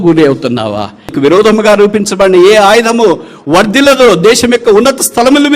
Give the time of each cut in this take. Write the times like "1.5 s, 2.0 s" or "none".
1.1 s